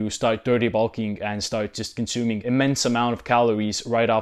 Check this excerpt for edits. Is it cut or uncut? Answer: uncut